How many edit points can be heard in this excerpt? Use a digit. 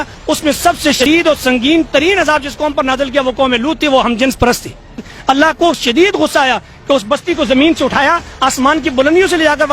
2